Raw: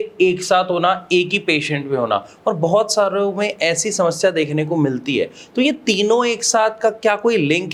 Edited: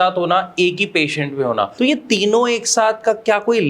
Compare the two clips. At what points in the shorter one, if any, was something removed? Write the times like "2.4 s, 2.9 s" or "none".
1.7 s

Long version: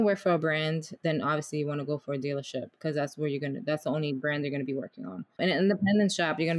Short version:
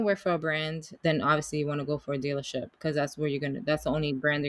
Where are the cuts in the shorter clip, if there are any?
none

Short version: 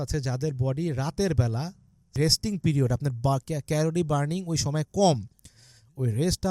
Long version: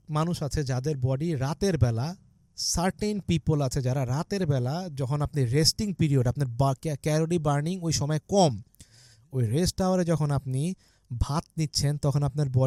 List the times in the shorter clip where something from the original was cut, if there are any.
2.1 s

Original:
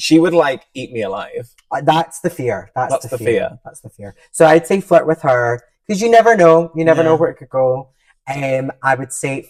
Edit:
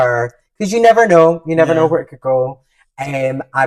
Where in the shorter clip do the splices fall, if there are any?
none

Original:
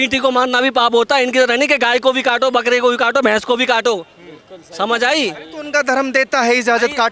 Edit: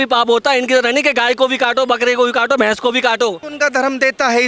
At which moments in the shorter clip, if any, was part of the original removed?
3.4 s

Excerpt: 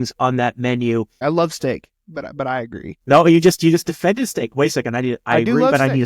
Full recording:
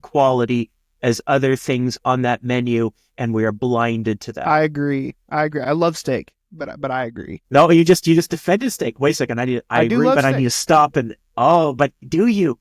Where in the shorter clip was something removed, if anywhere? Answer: 1.1 s

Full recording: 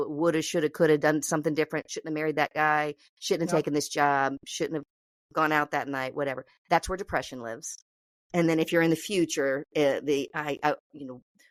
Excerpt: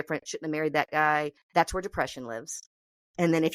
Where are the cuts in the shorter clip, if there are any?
1.4 s

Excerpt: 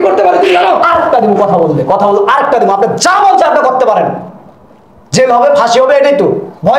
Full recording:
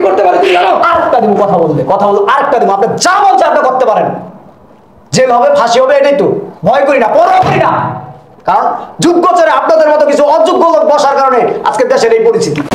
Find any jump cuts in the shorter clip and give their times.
none

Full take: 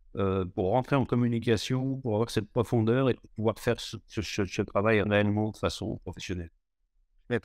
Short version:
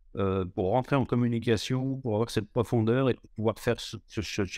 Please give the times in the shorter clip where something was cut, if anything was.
none

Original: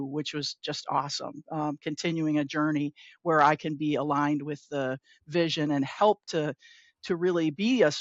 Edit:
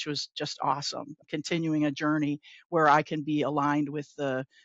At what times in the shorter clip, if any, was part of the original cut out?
1.2 s

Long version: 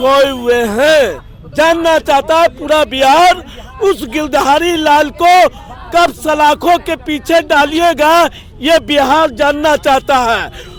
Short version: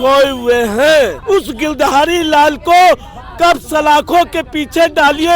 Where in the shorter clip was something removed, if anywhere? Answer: 1.2 s

